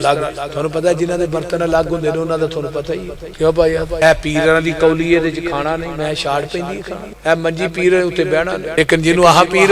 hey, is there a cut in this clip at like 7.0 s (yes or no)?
yes